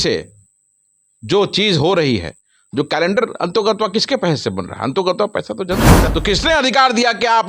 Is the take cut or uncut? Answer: cut